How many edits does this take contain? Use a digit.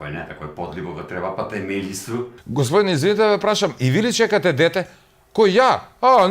1